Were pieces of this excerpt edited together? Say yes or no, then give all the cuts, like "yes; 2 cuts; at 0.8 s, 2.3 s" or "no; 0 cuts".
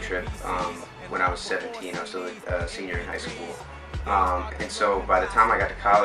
no; 0 cuts